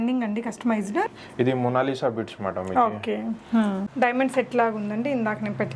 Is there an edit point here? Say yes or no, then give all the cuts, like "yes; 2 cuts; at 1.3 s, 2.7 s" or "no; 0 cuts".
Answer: yes; 2 cuts; at 1.1 s, 3.9 s